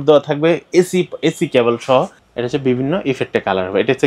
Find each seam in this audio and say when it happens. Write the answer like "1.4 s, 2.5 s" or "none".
2.2 s